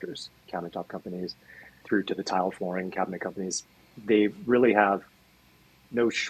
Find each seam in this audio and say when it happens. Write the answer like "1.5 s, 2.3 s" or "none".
1.7 s, 3.8 s